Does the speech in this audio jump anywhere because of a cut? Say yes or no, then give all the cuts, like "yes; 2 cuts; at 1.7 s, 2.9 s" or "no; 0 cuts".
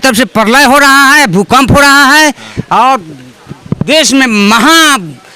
no; 0 cuts